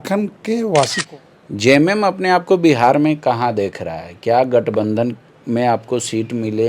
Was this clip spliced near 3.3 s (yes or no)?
no